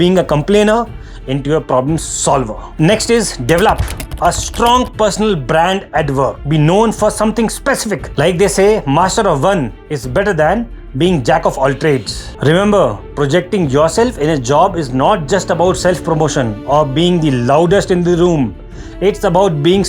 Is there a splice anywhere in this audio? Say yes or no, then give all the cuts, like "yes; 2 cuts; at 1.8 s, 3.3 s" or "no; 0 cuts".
yes; 1 cut; at 12.3 s